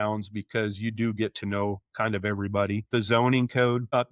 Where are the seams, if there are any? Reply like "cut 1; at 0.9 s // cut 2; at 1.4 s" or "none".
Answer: cut 1; at 2.9 s